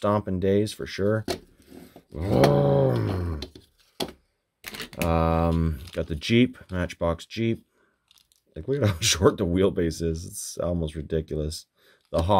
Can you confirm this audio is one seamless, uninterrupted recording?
yes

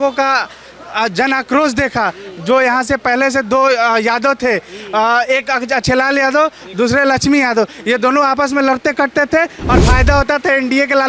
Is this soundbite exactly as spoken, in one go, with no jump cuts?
yes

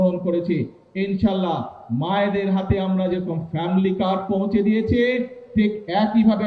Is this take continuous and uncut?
yes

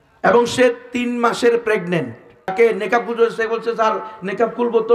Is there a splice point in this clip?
yes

